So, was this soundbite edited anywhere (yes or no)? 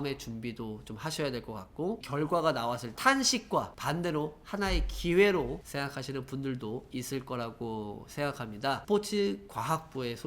yes